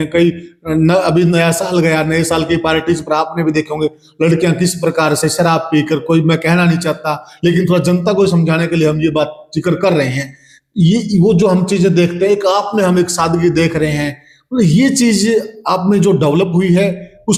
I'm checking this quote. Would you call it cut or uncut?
uncut